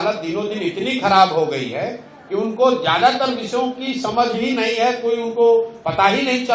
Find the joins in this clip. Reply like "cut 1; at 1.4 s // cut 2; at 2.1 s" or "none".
none